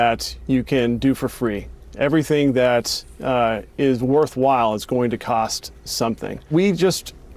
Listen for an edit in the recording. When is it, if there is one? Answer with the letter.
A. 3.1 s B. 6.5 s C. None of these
B